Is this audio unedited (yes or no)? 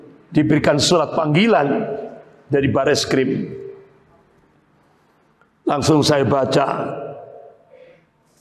yes